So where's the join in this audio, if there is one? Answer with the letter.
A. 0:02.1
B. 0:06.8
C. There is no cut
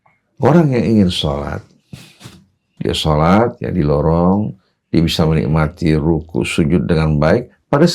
A